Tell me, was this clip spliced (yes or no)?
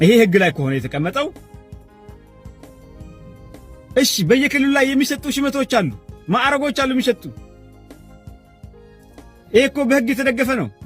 yes